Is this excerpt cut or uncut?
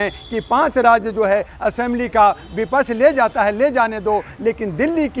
uncut